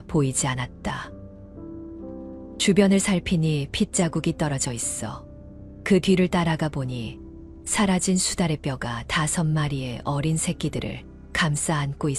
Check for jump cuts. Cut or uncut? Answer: uncut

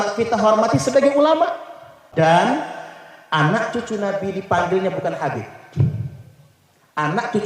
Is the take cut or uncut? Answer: cut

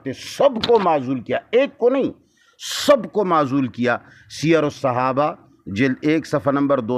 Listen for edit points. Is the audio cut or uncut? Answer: uncut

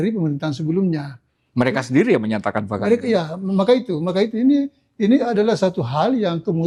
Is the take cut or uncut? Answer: uncut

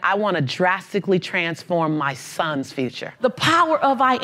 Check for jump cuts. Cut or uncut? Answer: cut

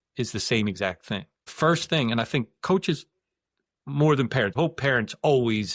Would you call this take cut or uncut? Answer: cut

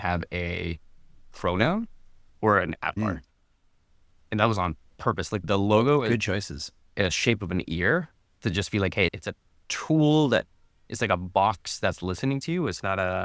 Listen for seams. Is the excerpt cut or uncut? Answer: uncut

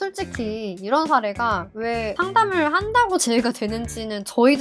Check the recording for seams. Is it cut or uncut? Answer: uncut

